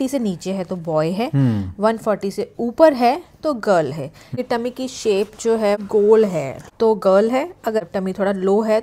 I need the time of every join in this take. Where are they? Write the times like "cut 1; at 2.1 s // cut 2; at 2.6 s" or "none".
cut 1; at 4.3 s // cut 2; at 5.8 s // cut 3; at 6.6 s // cut 4; at 7.8 s